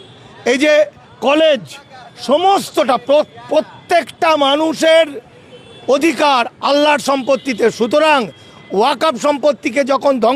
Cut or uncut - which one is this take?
uncut